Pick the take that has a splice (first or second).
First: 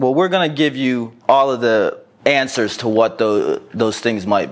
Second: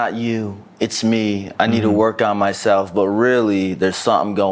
first